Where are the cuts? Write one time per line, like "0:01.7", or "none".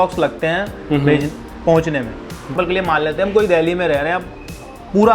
0:02.5